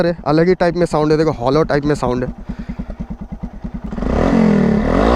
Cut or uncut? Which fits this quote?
cut